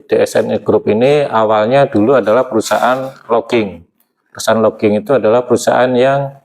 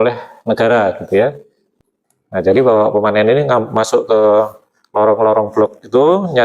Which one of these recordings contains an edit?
second; 1 cut; at 1.7 s

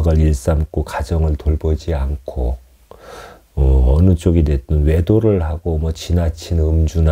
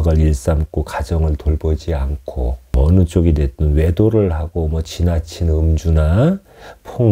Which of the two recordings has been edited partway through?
second; 1 cut; at 2.7 s

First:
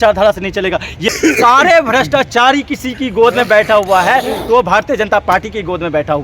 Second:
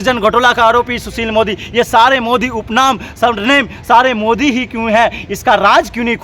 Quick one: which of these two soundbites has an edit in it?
first; 1 cut; at 1.1 s

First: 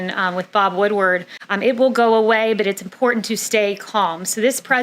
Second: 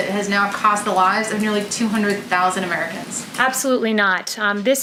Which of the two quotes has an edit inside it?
first; 1 cut; at 1.4 s

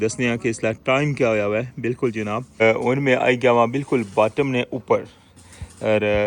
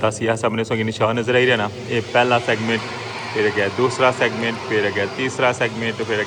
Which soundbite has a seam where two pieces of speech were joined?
first; 1 cut; at 2.6 s

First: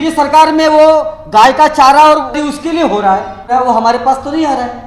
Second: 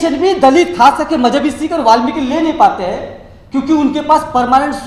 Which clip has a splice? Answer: first; 2 cuts; at 2.4 s, 3.5 s

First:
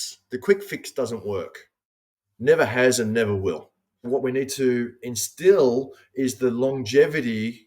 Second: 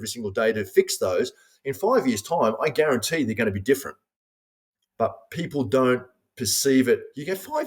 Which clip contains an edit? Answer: first; 1 cut; at 4.1 s

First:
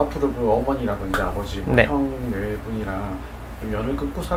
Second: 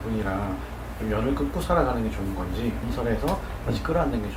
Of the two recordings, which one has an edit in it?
second; 1 cut; at 2.9 s

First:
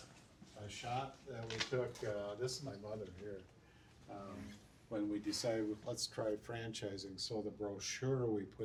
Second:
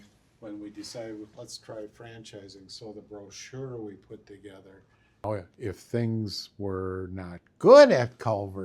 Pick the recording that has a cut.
second; 1 cut; at 5.2 s

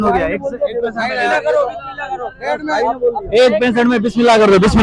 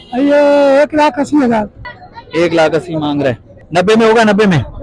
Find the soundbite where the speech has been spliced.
second; 2 cuts; at 1.7 s, 3.5 s

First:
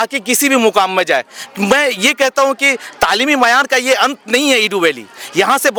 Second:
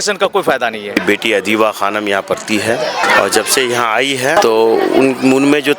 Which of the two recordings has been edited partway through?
second; 3 cuts; at 1.0 s, 3.0 s, 4.3 s

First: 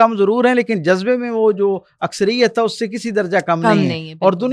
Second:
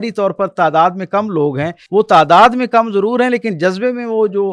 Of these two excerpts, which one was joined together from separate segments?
second; 1 cut; at 1.8 s

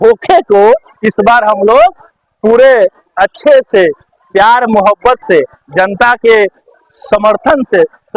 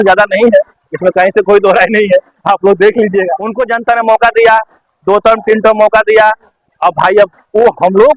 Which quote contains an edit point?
second; 1 cut; at 3.5 s

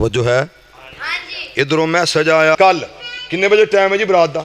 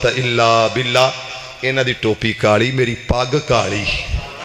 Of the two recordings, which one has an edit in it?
first; 1 cut; at 2.6 s

